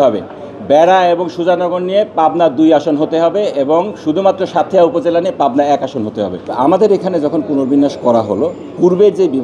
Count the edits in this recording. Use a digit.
1